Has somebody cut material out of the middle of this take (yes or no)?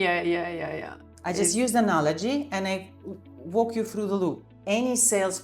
yes